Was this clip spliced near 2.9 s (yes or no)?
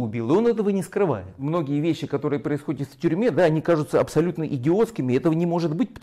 no